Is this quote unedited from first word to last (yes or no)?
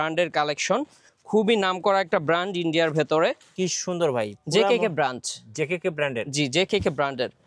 no